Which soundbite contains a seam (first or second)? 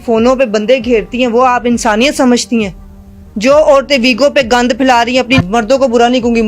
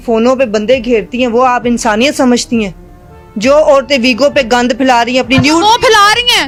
first